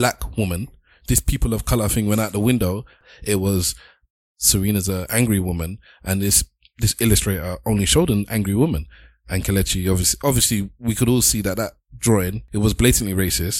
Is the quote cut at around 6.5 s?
no; 2 cuts; at 3.0 s, 12.4 s

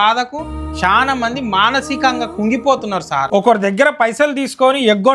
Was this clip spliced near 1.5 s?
no; 1 cut; at 3.3 s

